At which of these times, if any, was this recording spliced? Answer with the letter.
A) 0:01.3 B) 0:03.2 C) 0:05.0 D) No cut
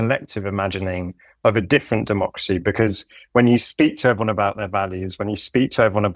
D